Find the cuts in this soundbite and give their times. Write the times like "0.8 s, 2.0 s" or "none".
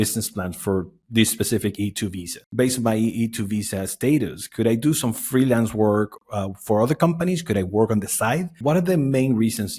2.5 s, 8.6 s